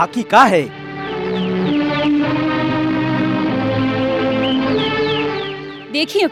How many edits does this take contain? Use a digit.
0